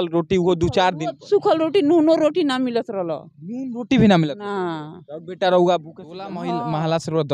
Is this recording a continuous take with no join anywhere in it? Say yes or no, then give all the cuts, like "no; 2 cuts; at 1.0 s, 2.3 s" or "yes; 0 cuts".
no; 1 cut; at 6.4 s